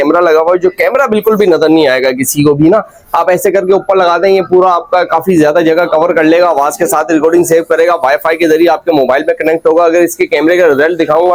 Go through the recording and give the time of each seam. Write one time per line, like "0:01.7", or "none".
none